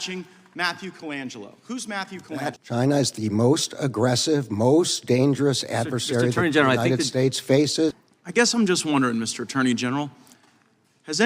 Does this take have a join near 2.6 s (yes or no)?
yes